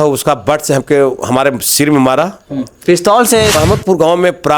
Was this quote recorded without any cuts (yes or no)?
no